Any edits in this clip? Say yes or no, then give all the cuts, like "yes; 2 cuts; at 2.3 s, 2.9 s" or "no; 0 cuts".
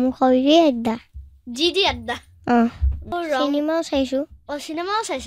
yes; 1 cut; at 3.1 s